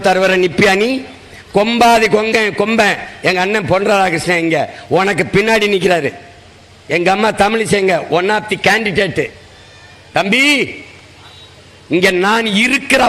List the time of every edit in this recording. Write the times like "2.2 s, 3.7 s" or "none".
none